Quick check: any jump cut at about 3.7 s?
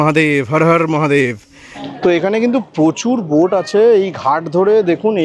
no; 1 cut; at 1.8 s

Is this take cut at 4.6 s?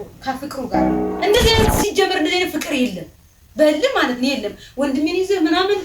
no; 1 cut; at 1.1 s

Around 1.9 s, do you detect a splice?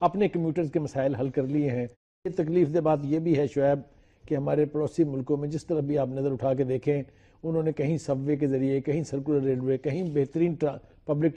yes; 1 cut; at 1.9 s

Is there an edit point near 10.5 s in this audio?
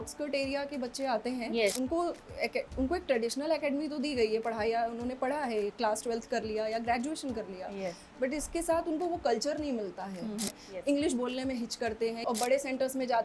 yes; 3 cuts; at 1.8 s, 10.5 s, 12.2 s

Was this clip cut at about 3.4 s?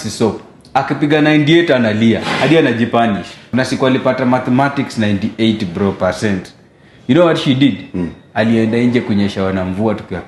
yes; 1 cut; at 3.4 s

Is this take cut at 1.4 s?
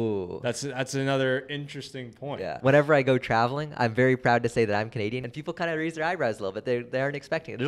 no; 2 cuts; at 2.6 s, 5.3 s

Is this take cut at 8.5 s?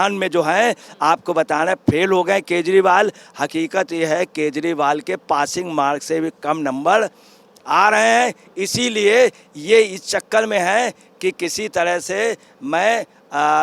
no; 0 cuts

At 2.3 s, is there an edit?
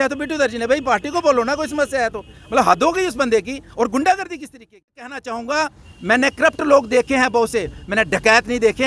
no; 1 cut; at 5.2 s

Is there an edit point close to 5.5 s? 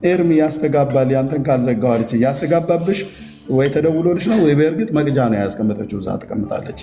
no; 0 cuts

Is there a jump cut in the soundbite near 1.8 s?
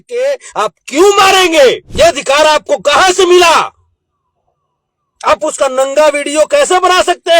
yes; 1 cut; at 1.8 s

